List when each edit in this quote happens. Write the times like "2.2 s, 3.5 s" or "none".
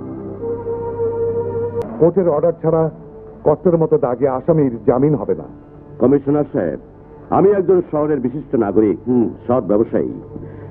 1.8 s